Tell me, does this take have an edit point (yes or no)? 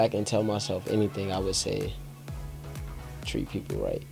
no